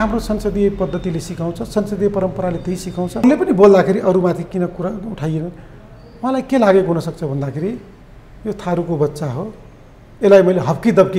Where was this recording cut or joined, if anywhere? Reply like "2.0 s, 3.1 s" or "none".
3.2 s